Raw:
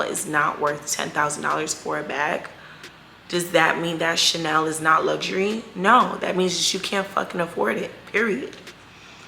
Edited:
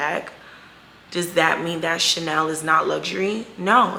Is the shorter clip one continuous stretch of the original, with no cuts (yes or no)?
yes